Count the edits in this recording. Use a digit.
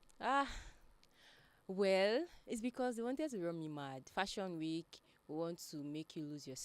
1